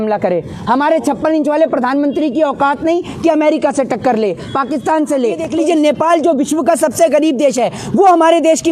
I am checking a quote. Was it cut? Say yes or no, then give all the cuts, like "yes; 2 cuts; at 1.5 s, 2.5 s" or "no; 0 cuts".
yes; 1 cut; at 5.5 s